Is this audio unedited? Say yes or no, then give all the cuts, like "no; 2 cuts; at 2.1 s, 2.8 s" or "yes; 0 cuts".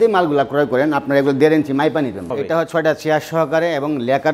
no; 1 cut; at 2.3 s